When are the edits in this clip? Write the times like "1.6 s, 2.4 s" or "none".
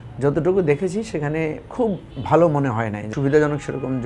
3.1 s